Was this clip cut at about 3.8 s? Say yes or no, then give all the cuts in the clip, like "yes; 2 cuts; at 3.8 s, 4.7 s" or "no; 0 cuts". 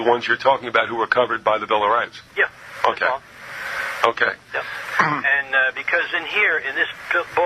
no; 1 cut; at 5.2 s